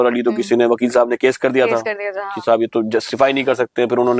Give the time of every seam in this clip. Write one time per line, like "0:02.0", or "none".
none